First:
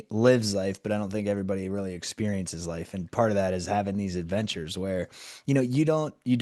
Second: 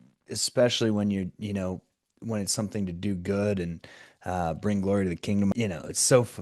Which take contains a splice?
second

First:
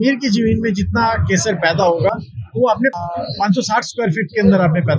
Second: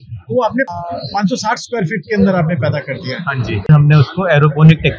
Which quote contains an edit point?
second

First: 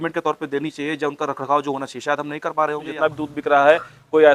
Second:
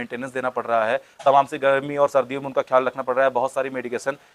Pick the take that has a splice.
first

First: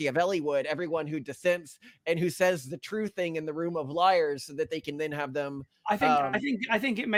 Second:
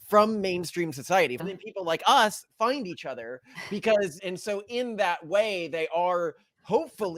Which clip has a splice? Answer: second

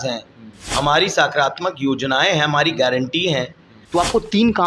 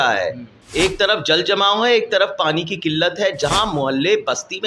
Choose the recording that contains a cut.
first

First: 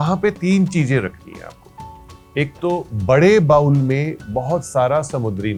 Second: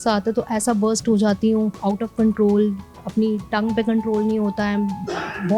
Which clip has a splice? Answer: second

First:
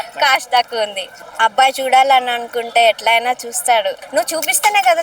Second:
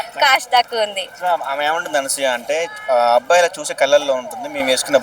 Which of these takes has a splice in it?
first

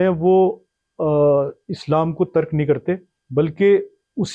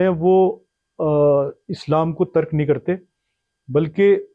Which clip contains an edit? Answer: first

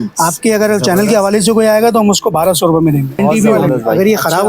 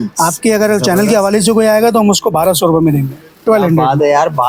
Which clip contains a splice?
first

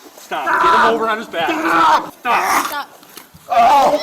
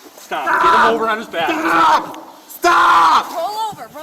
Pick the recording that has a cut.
first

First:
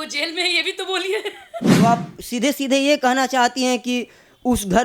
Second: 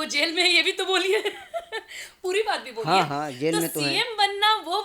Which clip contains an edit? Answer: first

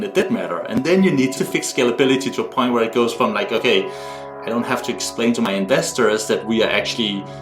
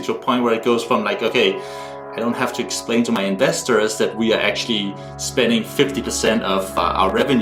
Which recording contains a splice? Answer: first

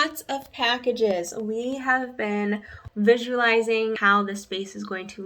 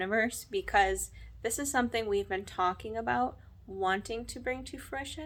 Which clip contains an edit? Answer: first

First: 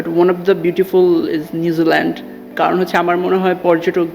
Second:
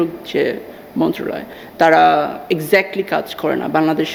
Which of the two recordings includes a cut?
first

